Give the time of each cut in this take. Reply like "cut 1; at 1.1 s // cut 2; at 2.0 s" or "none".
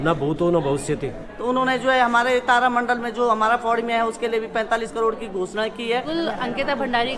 cut 1; at 1.2 s // cut 2; at 6.1 s